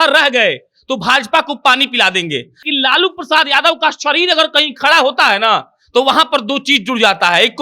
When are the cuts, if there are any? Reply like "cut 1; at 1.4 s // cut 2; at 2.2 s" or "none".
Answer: cut 1; at 2.6 s

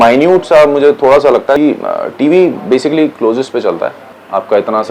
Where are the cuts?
cut 1; at 1.6 s

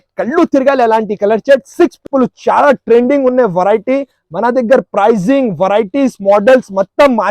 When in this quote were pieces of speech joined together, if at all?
cut 1; at 2.0 s

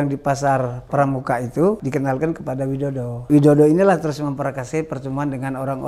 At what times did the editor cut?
cut 1; at 1.8 s // cut 2; at 3.3 s

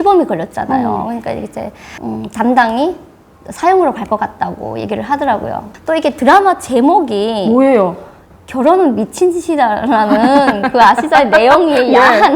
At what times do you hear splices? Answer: cut 1; at 5.7 s

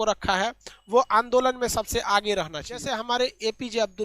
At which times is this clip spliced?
cut 1; at 2.9 s

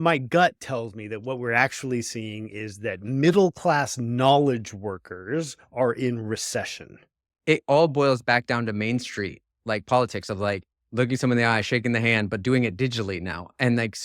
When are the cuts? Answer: cut 1; at 7.3 s

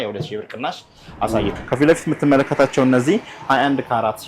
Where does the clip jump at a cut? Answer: cut 1; at 1.5 s

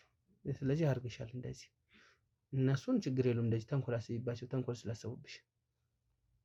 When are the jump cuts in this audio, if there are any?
none

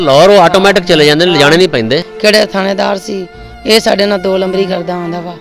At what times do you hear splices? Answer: cut 1; at 2.1 s

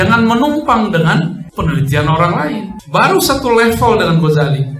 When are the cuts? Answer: cut 1; at 1.4 s // cut 2; at 2.7 s

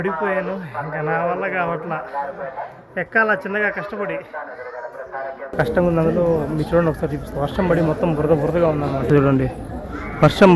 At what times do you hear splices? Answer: cut 1; at 5.6 s

